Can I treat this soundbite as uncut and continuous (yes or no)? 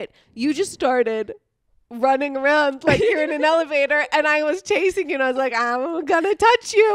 yes